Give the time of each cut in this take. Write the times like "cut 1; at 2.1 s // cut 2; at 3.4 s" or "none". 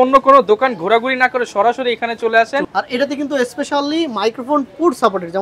cut 1; at 2.7 s